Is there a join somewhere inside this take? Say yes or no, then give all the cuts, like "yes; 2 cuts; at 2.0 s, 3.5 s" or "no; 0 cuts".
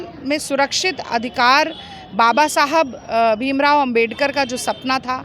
no; 0 cuts